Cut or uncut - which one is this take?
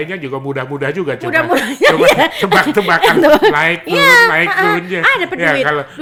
uncut